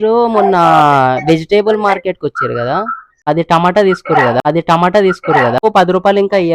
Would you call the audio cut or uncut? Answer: cut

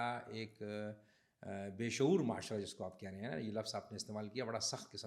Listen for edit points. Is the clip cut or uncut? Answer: uncut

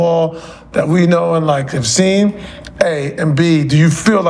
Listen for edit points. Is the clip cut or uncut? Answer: uncut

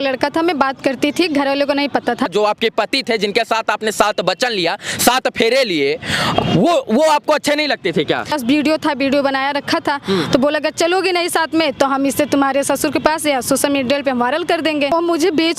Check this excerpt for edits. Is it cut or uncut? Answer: cut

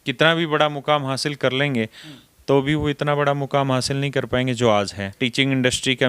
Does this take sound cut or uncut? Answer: cut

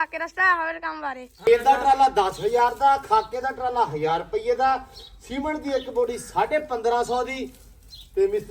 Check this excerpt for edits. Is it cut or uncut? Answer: cut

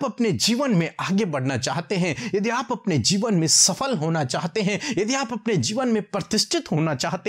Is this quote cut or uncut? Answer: uncut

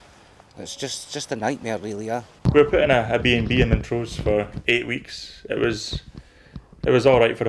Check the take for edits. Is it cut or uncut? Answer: cut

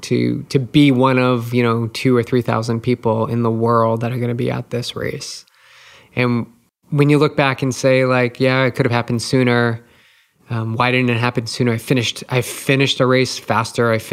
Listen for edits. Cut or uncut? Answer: cut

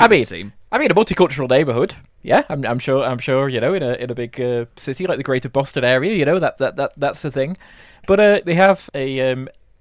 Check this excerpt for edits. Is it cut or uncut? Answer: cut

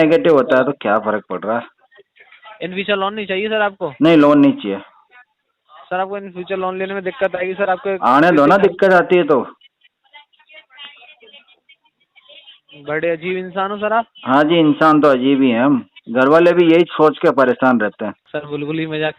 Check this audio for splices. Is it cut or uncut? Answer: cut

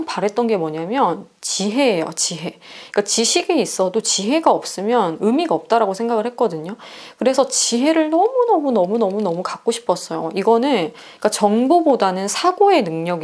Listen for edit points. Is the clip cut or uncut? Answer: uncut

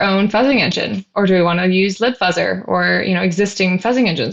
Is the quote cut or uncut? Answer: uncut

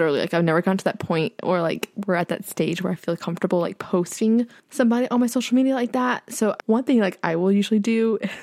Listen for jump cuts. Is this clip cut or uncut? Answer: cut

